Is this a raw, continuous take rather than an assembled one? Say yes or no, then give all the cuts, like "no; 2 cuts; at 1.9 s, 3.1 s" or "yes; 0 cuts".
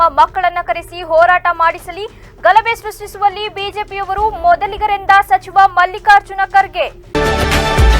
no; 1 cut; at 7.0 s